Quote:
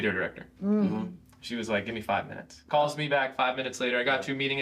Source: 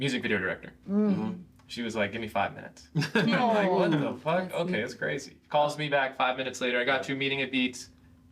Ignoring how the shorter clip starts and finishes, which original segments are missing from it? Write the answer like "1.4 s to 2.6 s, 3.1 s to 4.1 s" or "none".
2.8 s to 5.3 s

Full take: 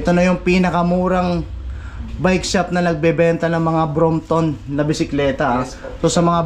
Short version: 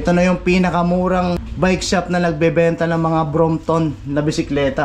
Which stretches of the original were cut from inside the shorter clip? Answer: 1.5 s to 2.1 s

